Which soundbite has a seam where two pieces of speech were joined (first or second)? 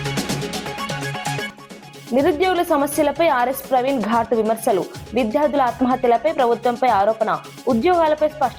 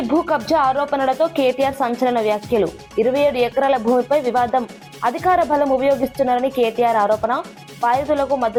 first